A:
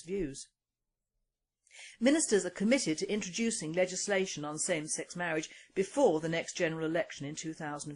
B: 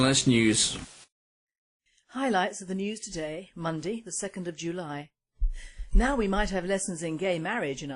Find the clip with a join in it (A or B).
B